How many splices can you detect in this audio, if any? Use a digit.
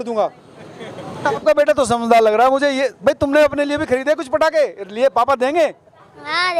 1